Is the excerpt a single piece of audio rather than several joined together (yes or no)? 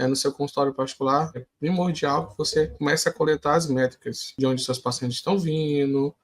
no